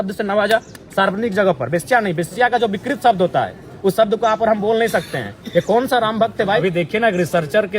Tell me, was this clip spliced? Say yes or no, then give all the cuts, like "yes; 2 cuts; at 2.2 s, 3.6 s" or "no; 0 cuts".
yes; 1 cut; at 6.6 s